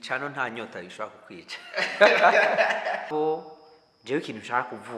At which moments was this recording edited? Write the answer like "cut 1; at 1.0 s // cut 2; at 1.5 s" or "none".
cut 1; at 3.1 s